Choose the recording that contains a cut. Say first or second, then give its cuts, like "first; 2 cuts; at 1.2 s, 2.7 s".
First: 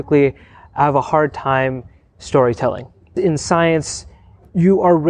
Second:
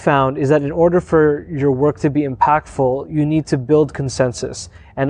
first; 1 cut; at 3.1 s